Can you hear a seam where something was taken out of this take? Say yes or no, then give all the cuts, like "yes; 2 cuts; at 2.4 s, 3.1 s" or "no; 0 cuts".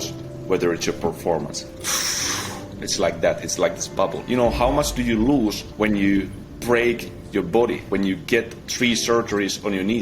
yes; 3 cuts; at 1.7 s, 4.2 s, 5.6 s